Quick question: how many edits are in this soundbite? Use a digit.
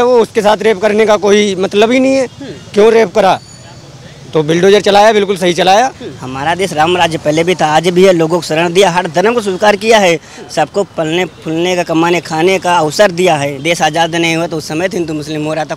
2